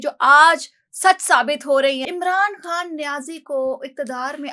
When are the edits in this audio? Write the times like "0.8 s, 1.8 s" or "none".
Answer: 2.0 s